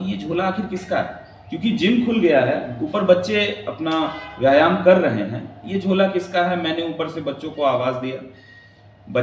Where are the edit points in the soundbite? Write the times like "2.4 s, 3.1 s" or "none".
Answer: none